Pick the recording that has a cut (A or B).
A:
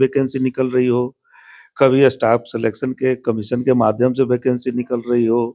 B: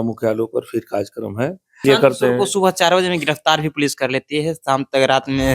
B